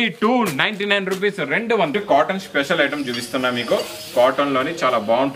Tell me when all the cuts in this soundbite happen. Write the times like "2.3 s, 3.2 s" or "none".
1.9 s